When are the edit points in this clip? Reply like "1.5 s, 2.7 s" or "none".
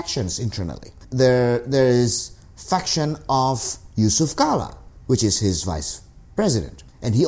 none